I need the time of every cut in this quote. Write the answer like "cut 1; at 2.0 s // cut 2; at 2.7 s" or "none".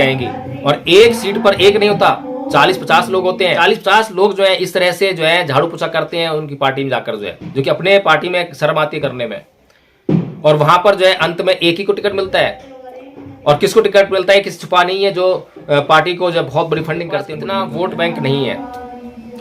cut 1; at 3.6 s // cut 2; at 17.4 s

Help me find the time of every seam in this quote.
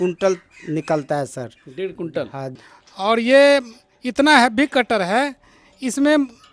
cut 1; at 2.4 s

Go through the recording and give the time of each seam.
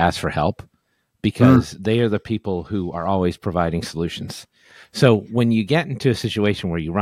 none

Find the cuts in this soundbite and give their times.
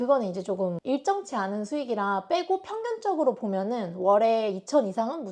none

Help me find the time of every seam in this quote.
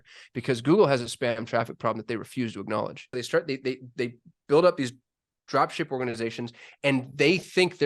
cut 1; at 3.1 s

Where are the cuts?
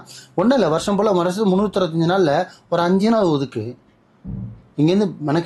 none

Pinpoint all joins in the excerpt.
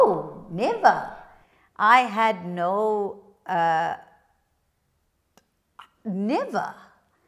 none

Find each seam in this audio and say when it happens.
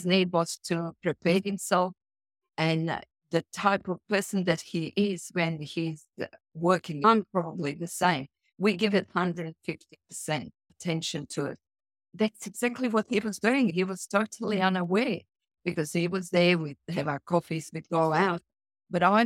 cut 1; at 7.0 s // cut 2; at 10.6 s // cut 3; at 12.1 s // cut 4; at 13.7 s

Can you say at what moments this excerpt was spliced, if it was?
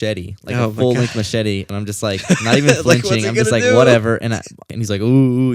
cut 1; at 1.7 s // cut 2; at 4.6 s

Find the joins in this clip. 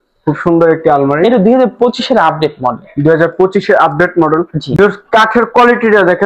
none

